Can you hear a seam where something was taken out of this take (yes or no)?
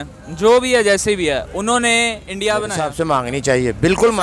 yes